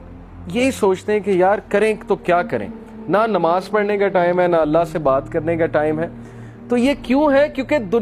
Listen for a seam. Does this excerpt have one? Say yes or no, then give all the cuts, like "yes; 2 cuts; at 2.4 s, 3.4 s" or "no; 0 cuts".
no; 0 cuts